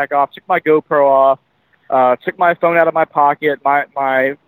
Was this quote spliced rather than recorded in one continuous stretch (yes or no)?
no